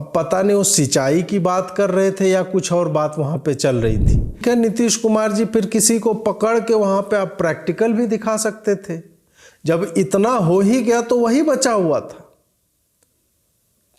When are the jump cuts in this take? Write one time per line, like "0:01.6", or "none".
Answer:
0:04.4

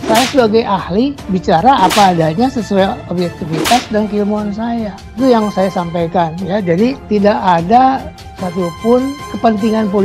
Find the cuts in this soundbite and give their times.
none

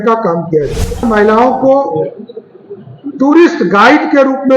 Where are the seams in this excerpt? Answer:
0:01.0

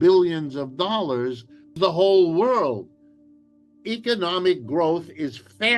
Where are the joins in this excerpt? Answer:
0:01.7

